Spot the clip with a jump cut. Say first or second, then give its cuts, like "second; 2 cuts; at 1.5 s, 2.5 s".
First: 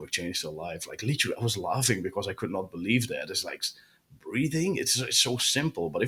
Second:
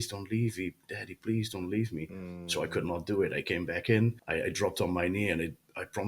second; 1 cut; at 4.2 s